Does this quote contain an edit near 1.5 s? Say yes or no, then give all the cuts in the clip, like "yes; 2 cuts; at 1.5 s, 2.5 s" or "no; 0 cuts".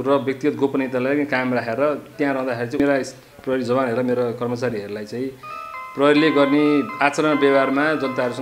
no; 1 cut; at 2.8 s